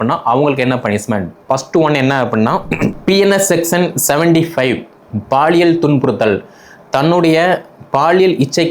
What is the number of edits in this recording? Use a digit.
1